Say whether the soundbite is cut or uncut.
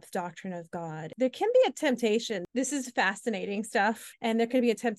cut